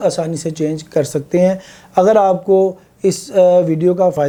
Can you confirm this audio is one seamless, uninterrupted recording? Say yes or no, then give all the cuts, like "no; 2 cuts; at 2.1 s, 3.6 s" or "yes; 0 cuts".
yes; 0 cuts